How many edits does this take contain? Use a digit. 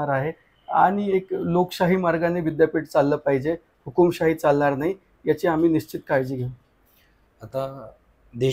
0